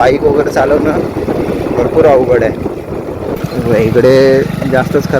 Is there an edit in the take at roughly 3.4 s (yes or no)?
yes